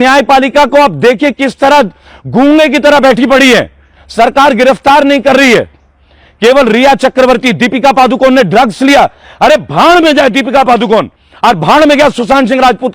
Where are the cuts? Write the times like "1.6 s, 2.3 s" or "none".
none